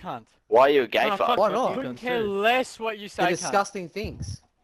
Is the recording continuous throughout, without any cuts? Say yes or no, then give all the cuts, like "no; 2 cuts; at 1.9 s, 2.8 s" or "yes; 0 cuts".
yes; 0 cuts